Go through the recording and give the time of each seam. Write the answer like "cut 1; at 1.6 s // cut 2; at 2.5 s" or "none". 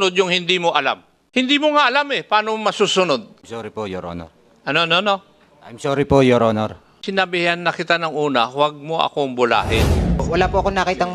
cut 1; at 1.1 s // cut 2; at 3.4 s // cut 3; at 6.9 s // cut 4; at 10.2 s